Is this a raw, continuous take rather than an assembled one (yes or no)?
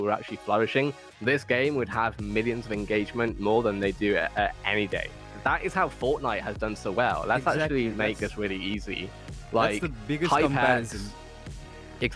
yes